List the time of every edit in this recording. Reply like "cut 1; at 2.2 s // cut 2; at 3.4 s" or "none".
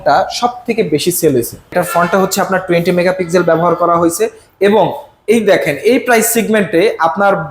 cut 1; at 1.7 s